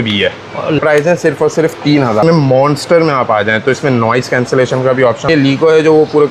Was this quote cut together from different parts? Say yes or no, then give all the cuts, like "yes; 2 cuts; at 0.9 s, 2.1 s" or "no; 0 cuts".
yes; 3 cuts; at 0.8 s, 2.2 s, 5.3 s